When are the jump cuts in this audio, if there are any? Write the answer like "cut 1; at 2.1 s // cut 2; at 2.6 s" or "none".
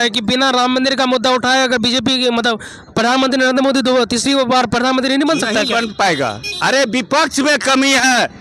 none